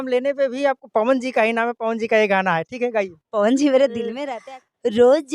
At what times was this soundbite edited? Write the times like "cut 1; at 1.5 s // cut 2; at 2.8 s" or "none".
cut 1; at 4.2 s